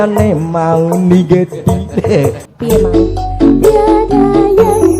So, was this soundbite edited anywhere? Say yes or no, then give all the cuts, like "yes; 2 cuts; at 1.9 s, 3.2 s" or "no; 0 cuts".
yes; 1 cut; at 2.4 s